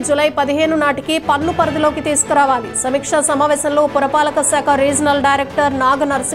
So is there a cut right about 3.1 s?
no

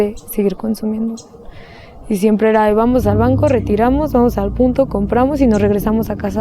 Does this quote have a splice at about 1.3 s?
no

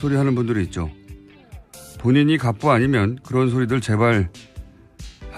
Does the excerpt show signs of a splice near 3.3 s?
no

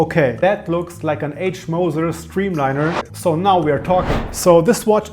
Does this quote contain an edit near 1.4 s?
no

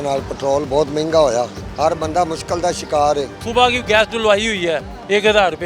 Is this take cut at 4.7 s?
no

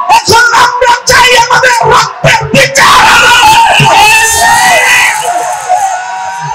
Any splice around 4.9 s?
no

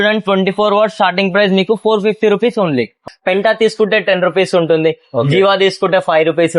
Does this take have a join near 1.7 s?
no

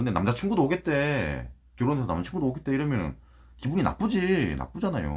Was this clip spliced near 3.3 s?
no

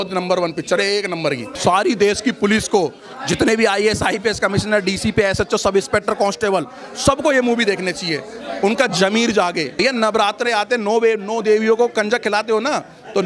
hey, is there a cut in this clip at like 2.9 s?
no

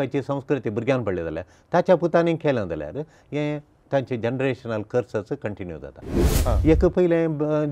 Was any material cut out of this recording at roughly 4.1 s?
no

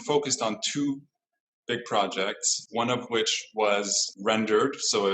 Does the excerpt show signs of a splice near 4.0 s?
yes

